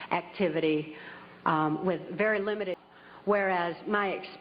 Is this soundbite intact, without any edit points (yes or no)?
no